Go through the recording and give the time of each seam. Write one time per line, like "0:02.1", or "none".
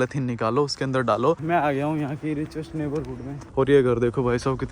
0:01.4
0:03.4